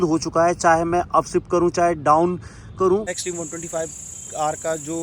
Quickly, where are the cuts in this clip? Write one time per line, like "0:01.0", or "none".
0:03.2